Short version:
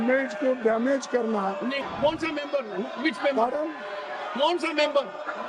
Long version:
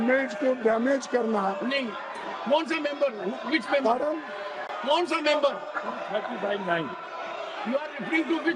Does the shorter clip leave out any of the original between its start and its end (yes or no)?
yes